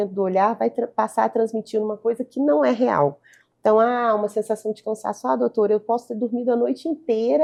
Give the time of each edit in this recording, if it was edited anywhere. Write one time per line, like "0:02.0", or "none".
none